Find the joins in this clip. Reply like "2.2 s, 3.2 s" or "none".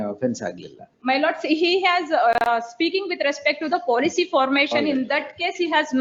none